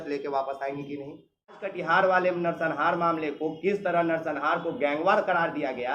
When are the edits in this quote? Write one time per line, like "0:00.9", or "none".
0:01.7